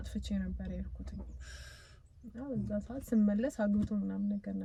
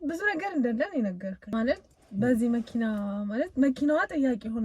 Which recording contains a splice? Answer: second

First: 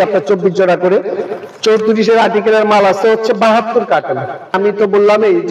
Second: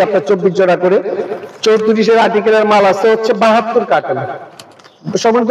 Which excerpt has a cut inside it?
first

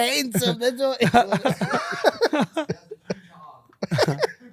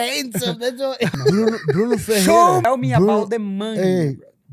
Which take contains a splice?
second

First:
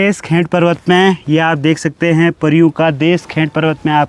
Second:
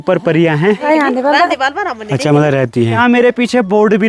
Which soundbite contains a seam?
second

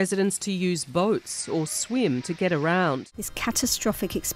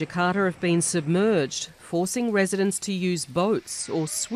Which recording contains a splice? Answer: first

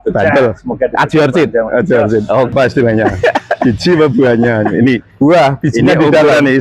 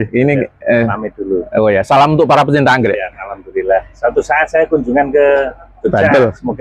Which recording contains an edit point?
first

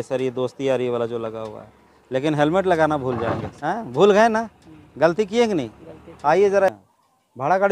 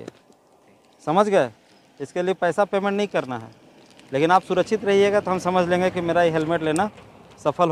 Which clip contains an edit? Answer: first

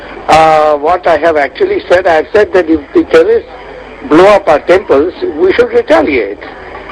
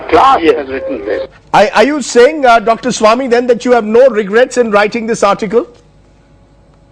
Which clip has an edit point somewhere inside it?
second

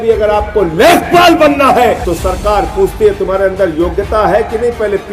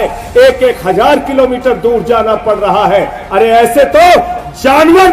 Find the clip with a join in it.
first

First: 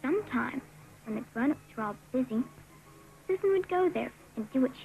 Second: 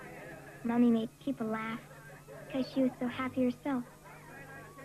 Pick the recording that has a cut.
second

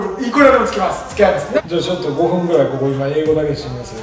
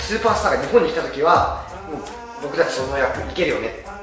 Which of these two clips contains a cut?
first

